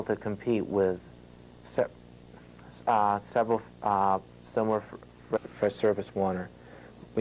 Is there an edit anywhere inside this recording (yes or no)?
no